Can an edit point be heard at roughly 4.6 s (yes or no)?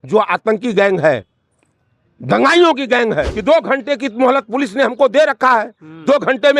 no